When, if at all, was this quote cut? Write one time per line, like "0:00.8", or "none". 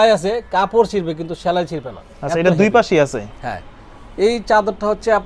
none